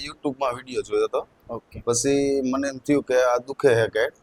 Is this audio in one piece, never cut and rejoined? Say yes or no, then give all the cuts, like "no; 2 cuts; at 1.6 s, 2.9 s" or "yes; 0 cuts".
yes; 0 cuts